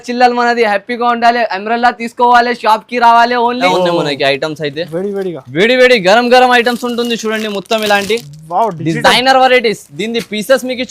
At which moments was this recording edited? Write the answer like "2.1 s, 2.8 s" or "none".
3.7 s